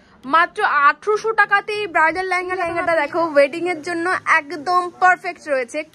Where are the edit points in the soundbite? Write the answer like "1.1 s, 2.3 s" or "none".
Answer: 2.7 s